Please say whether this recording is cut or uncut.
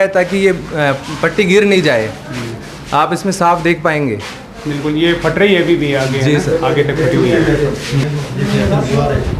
uncut